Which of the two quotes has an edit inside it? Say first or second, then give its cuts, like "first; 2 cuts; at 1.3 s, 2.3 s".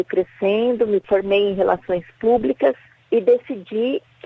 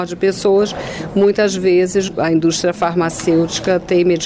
second; 1 cut; at 2.1 s